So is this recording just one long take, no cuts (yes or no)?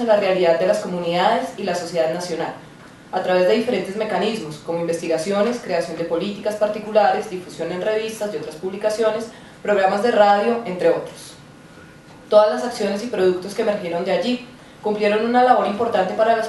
no